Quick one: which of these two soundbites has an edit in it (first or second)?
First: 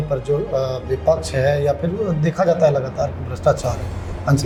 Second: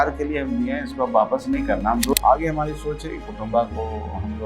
second